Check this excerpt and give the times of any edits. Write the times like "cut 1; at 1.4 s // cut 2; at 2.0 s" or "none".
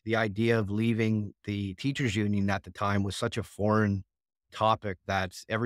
none